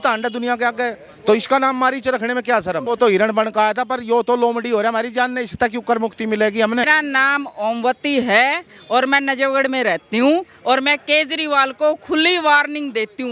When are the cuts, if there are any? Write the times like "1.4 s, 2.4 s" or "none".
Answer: 2.8 s, 6.8 s